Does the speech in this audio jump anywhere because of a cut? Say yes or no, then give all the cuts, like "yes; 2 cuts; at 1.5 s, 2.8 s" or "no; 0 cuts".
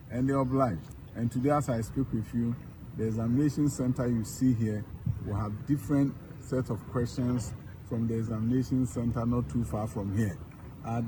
no; 0 cuts